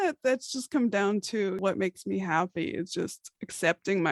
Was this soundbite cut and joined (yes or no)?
yes